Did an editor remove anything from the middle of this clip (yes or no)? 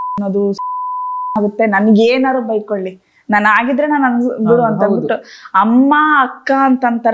no